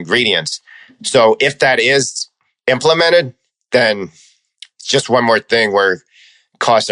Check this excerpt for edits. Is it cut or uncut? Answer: uncut